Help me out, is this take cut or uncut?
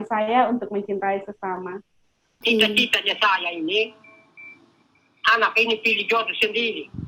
cut